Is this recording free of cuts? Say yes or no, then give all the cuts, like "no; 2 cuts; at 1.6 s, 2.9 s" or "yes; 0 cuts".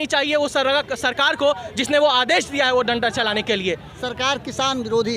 no; 1 cut; at 3.9 s